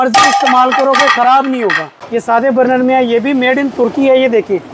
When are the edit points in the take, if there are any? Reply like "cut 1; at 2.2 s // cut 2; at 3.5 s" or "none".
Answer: cut 1; at 2.0 s